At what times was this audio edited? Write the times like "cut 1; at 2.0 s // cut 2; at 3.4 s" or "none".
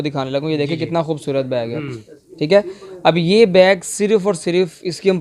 none